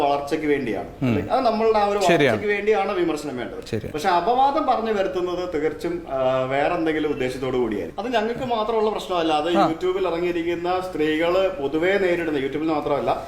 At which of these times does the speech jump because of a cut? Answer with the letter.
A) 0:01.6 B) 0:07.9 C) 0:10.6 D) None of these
B